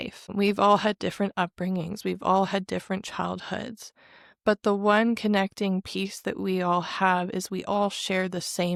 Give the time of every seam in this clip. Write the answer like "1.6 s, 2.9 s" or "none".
none